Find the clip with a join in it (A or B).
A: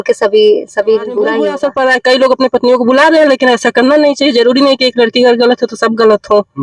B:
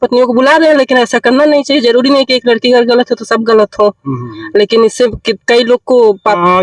A